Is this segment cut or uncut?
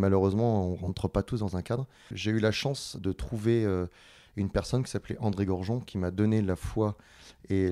cut